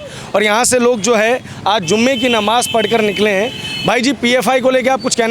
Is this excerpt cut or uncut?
uncut